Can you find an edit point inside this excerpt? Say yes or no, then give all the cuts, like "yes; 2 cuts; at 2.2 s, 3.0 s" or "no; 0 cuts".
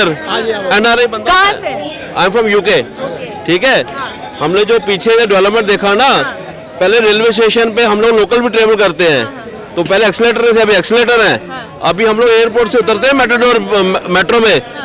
no; 0 cuts